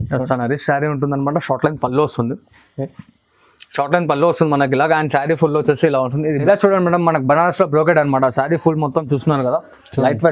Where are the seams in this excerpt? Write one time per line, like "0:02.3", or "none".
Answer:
0:06.4